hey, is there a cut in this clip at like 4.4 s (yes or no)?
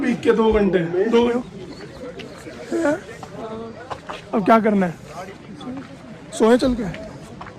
no